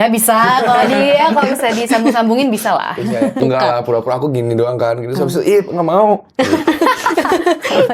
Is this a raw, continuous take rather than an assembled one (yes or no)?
no